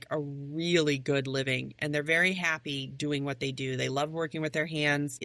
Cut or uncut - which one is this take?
uncut